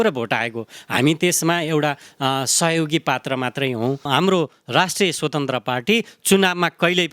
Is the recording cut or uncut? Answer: cut